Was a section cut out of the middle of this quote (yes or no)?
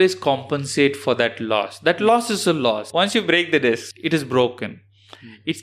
yes